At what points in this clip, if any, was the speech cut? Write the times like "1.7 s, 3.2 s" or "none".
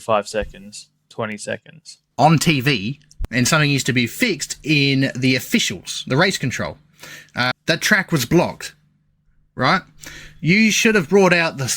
3.1 s, 7.5 s